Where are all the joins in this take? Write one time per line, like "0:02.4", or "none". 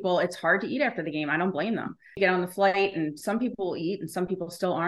0:02.2